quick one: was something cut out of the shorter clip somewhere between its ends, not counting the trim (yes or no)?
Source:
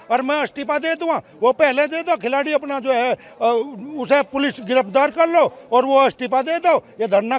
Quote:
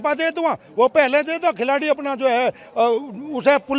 no